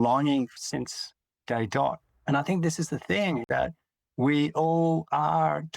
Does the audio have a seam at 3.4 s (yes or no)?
yes